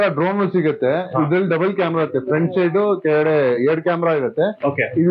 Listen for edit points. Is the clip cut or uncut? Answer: uncut